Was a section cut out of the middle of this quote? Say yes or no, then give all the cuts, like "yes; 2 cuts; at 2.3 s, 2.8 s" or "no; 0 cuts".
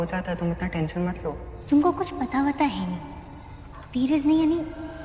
no; 0 cuts